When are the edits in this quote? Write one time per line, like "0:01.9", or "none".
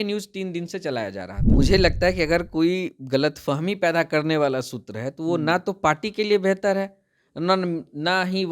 0:01.3

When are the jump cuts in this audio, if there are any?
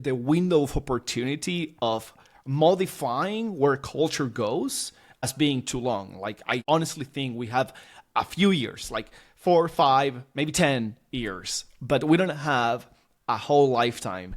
0:05.3
0:06.6

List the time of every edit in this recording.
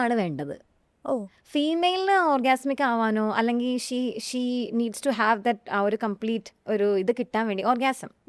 none

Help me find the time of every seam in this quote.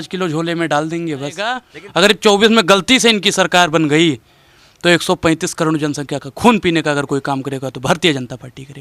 0:01.7

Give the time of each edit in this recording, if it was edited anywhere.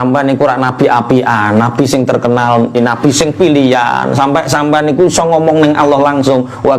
0:02.8

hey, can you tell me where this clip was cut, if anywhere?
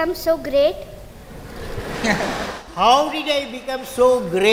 none

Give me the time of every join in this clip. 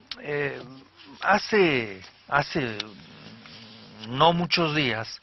none

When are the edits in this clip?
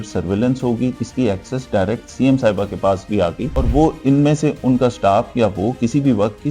0:00.9
0:03.5

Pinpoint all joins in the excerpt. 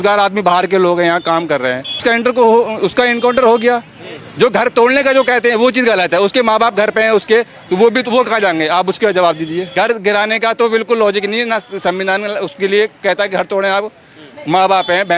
0:02.0
0:09.7

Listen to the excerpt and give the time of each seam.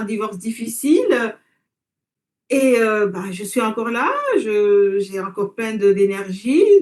none

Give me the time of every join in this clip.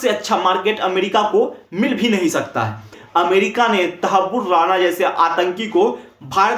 0:03.0

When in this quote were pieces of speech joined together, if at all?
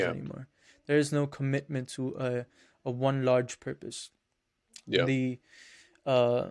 none

